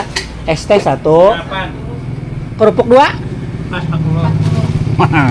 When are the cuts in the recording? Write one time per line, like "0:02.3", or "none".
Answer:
none